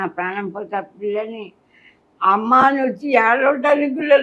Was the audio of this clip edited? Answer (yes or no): no